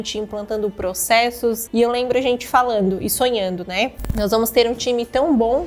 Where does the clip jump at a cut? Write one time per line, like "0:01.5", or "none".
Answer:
0:01.6
0:04.2